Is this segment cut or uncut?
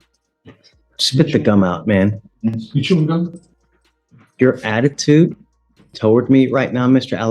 uncut